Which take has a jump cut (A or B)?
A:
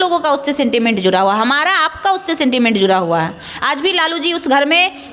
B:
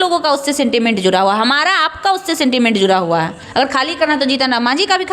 B